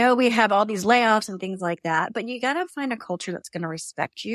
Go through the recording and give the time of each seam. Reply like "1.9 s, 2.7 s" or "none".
none